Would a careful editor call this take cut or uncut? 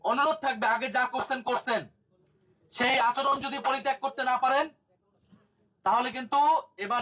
uncut